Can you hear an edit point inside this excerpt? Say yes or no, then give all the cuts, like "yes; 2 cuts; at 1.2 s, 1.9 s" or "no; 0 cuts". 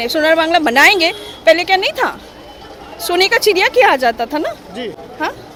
no; 0 cuts